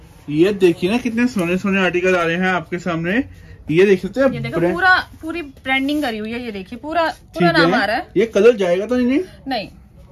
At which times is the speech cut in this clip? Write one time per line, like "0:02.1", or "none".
none